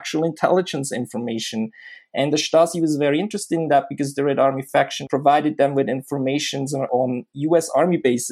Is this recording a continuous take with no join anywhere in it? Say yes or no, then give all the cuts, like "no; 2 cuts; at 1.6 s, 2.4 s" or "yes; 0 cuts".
no; 2 cuts; at 5.0 s, 6.9 s